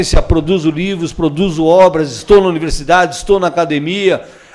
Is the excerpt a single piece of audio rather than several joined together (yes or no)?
no